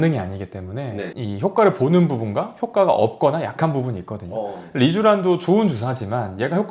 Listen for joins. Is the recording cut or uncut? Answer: uncut